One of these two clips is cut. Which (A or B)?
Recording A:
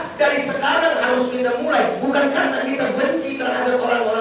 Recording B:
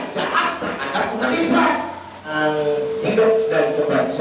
B